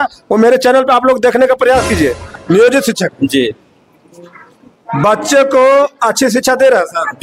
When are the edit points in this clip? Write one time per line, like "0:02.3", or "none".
0:02.3